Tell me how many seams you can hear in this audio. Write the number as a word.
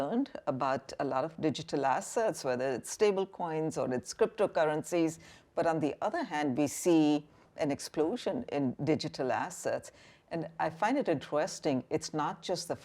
one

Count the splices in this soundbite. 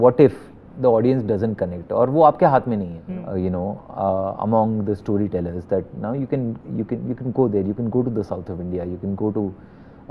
one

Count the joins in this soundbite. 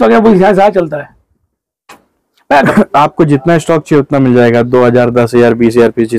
one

